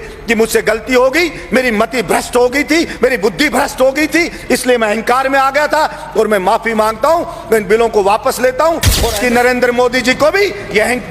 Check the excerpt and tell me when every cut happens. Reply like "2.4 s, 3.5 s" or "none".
9.0 s